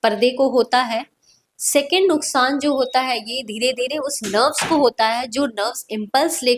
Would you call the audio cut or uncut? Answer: uncut